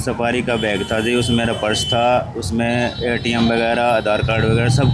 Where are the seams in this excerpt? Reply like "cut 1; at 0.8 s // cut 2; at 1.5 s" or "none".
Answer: none